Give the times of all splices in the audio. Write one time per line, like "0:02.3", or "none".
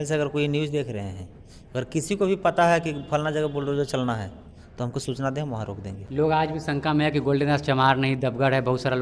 0:06.0